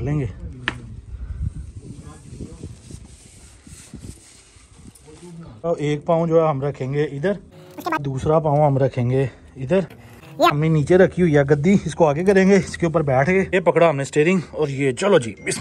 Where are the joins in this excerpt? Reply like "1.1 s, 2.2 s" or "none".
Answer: 5.7 s, 8.0 s, 10.6 s